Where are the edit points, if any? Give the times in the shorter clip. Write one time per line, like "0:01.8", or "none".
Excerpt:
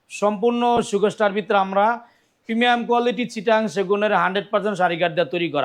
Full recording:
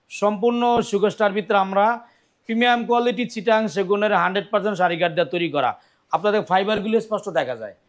none